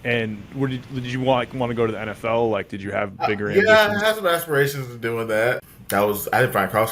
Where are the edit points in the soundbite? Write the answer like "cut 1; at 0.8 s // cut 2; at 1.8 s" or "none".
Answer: cut 1; at 5.7 s